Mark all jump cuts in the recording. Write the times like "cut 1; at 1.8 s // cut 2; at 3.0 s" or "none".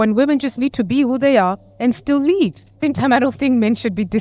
cut 1; at 2.8 s